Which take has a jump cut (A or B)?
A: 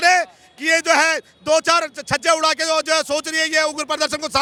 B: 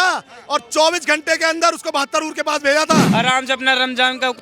B